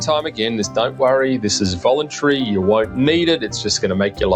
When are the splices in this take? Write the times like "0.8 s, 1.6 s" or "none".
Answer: none